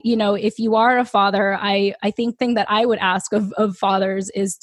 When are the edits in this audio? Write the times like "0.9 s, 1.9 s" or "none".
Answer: 2.4 s